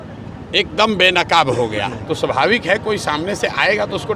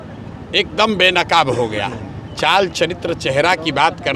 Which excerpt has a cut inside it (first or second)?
first